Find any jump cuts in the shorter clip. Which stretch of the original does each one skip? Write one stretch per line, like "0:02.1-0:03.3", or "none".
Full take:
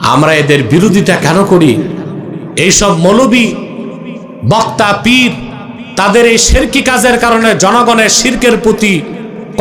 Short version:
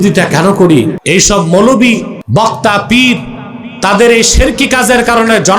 0:01.9-0:02.5
0:03.7-0:04.3

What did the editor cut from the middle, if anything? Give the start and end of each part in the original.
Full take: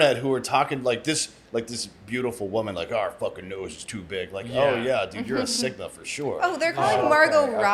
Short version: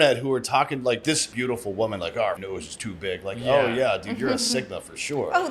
0:01.3-0:02.0
0:03.1-0:03.5

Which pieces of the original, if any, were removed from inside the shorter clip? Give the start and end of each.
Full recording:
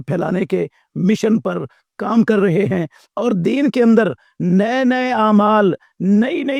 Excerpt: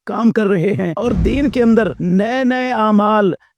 0:02.8-0:03.1
0:04.2-0:04.4

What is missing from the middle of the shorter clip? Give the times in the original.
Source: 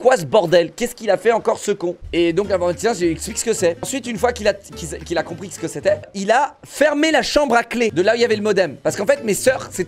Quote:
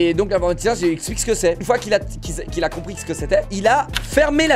0:03.8-0:04.1
0:06.0-0:06.1

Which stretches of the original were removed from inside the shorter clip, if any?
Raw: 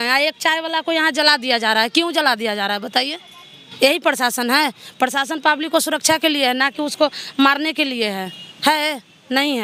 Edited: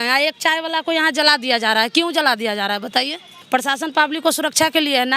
0:03.3-0:04.8

